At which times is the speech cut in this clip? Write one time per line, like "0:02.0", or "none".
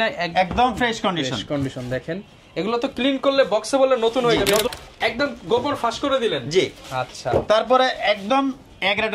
0:04.7